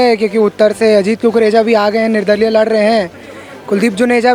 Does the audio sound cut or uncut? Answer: uncut